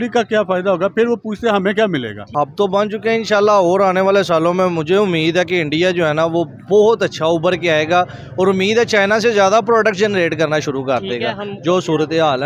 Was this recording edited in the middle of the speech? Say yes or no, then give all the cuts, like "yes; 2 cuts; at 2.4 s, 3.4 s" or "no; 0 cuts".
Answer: yes; 1 cut; at 2.2 s